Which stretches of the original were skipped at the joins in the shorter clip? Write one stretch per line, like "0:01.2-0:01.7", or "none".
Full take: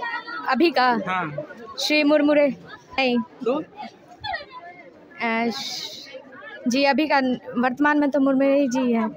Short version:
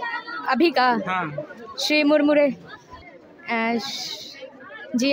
0:02.8-0:04.5